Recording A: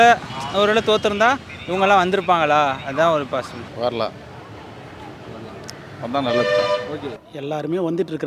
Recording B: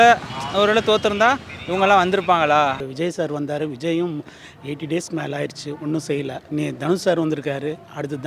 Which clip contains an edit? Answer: B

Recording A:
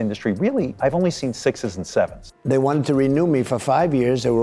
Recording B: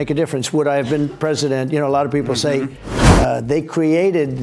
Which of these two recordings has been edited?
A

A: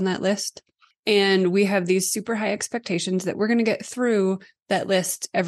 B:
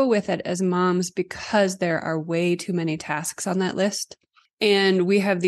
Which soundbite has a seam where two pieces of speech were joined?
A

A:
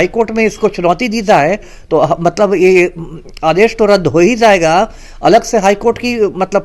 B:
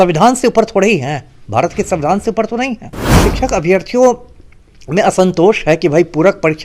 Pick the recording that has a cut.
B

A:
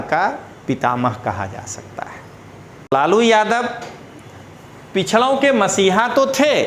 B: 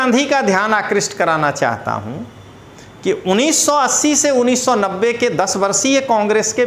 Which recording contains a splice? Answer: A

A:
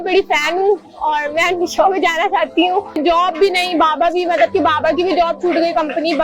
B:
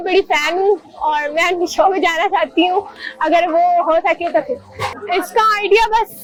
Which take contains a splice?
A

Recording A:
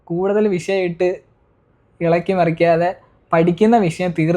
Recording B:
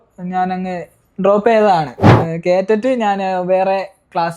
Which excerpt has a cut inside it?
B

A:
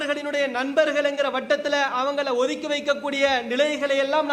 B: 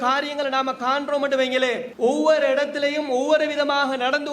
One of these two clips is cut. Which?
B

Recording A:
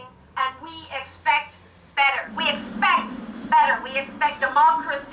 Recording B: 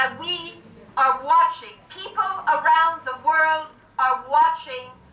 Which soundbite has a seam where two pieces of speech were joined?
A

